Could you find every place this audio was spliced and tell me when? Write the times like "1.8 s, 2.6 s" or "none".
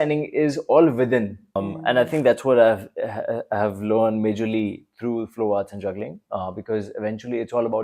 1.7 s